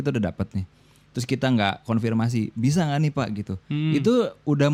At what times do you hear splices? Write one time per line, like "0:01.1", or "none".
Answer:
none